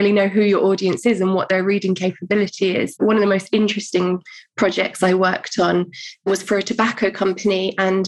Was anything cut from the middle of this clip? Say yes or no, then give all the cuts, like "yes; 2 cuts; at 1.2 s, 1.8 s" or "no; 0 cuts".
yes; 2 cuts; at 3.0 s, 6.3 s